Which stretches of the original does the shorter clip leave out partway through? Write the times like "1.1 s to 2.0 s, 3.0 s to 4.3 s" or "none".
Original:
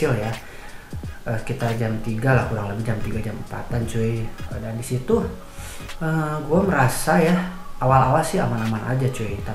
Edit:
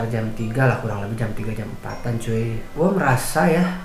4.4 s to 6.4 s